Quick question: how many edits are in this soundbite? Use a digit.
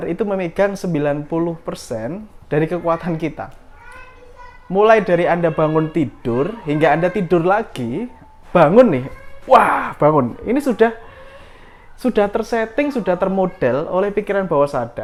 0